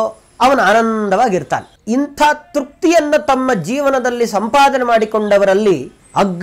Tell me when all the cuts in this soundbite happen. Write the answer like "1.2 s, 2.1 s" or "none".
none